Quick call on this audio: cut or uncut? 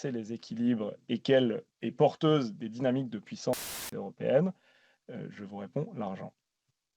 cut